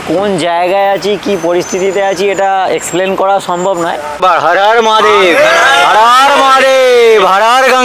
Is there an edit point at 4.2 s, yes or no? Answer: yes